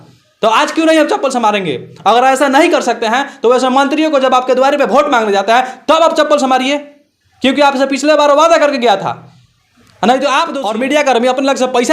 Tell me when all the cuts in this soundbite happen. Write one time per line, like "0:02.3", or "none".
0:10.6

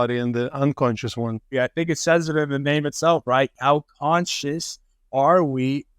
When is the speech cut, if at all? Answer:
0:01.5
0:03.5

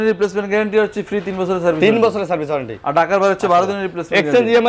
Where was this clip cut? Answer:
none

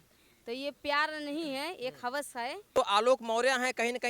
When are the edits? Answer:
0:02.8

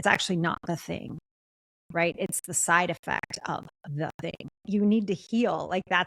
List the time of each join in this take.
0:04.5

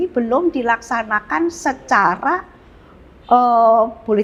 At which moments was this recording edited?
none

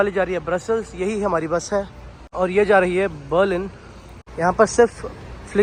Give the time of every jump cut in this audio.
none

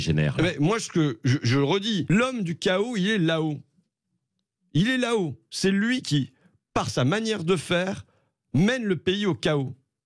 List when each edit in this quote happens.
0:02.1

